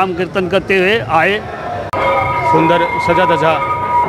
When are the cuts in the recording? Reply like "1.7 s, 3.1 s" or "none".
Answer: 1.9 s